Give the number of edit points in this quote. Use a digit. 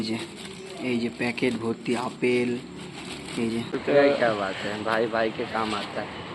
1